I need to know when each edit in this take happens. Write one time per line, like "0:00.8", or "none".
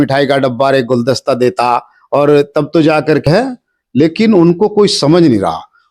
0:03.3